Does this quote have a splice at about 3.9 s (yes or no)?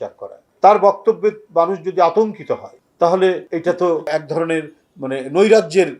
yes